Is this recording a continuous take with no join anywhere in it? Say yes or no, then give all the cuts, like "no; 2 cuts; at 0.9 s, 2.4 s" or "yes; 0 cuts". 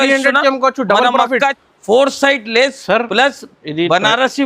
no; 1 cut; at 1.6 s